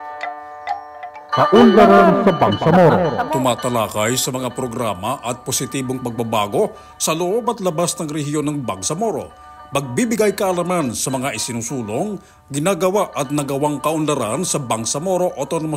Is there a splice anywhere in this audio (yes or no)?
yes